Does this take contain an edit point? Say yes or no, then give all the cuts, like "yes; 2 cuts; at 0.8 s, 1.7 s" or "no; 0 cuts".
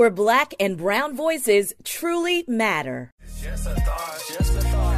yes; 1 cut; at 3.1 s